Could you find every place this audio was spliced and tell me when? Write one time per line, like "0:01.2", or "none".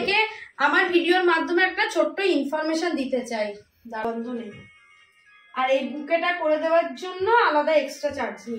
0:04.0